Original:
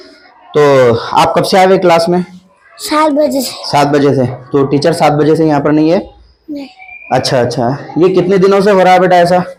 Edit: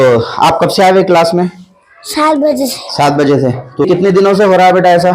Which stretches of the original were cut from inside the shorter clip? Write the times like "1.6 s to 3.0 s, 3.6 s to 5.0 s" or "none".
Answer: 4.6 s to 8.1 s